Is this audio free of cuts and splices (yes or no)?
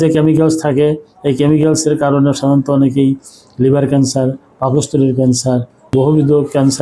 yes